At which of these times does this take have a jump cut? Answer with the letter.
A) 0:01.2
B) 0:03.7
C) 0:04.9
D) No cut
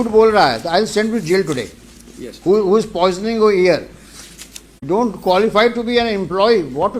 C